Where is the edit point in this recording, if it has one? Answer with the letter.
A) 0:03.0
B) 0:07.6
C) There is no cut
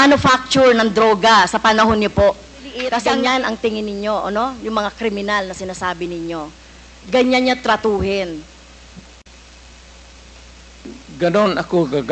A